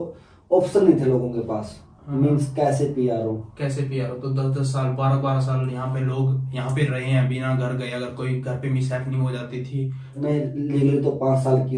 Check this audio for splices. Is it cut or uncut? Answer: cut